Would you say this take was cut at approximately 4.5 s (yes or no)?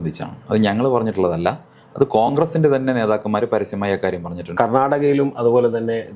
yes